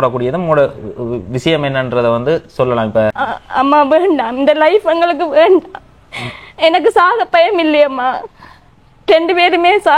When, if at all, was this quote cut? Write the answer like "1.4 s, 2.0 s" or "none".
3.2 s